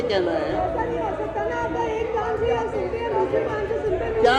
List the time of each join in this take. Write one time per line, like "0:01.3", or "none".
none

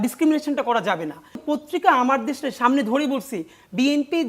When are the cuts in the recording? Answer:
0:01.4

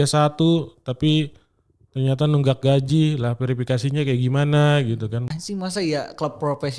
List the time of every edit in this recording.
0:05.2

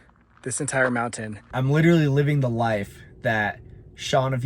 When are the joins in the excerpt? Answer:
0:01.4

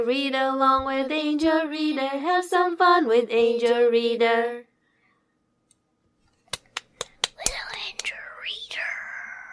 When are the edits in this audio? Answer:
0:07.4

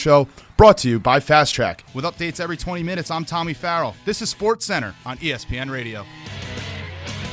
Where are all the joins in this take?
0:01.9

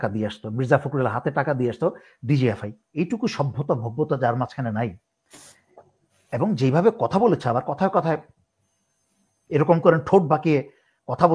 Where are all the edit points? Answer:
0:02.9

